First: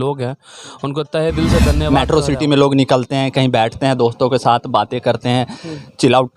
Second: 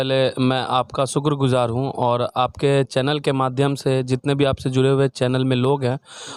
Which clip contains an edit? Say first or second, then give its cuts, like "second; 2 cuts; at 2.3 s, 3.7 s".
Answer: first; 1 cut; at 1.8 s